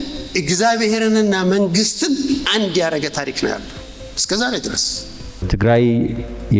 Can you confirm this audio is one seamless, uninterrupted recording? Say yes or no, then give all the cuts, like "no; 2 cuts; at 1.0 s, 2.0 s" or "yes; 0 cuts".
no; 1 cut; at 5.5 s